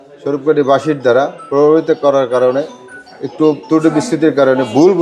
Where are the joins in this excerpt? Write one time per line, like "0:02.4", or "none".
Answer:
none